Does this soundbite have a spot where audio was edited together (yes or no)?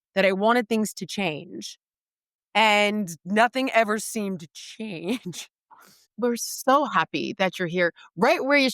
yes